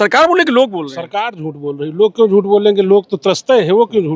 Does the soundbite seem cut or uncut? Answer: uncut